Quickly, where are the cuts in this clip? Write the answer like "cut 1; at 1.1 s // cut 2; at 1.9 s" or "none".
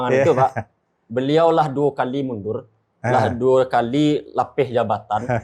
none